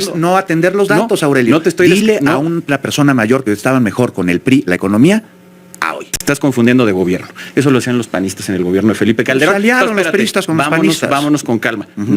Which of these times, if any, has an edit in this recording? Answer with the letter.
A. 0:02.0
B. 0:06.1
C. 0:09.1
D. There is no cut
B